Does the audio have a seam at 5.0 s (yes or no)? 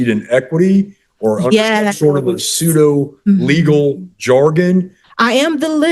yes